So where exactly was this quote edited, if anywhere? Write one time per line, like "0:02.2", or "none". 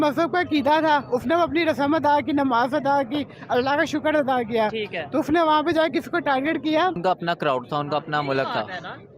0:07.0